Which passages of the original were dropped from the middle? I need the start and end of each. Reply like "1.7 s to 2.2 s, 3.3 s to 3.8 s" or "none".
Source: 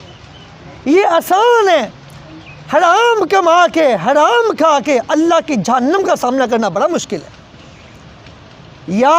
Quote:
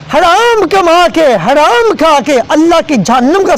none

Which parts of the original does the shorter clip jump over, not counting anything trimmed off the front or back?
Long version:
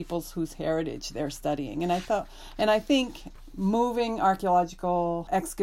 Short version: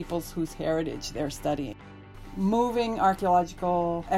1.8 s to 3.0 s

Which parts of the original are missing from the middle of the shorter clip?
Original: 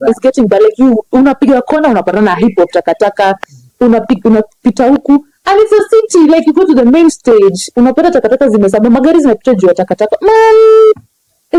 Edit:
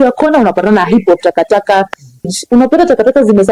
3.8 s to 7.5 s

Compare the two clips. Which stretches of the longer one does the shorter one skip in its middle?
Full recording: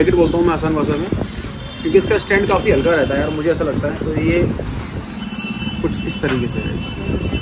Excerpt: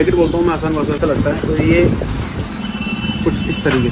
1.0 s to 3.6 s

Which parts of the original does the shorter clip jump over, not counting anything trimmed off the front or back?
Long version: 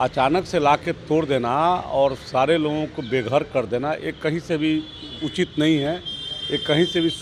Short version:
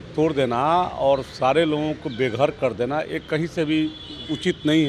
none

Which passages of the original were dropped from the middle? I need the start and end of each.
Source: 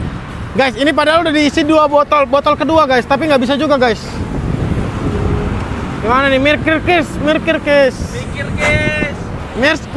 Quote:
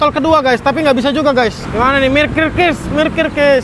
4.1 s to 5.9 s

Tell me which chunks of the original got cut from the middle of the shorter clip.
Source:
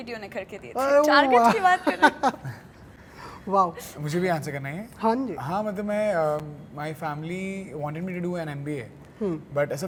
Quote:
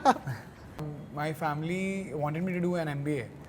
3.2 s to 6.6 s

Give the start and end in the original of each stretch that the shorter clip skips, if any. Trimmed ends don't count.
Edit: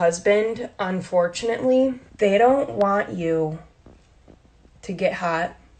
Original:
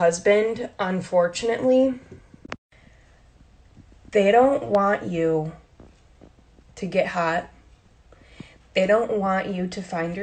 2.1 s to 4.0 s

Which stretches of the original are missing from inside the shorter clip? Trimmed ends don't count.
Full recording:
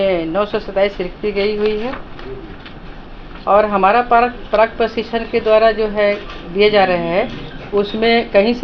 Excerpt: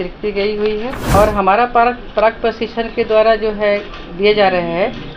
2.0 s to 3.4 s

